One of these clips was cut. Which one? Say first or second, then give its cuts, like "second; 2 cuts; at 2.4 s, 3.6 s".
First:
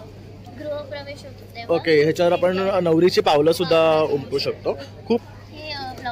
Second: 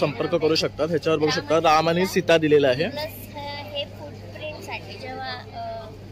first; 1 cut; at 5.2 s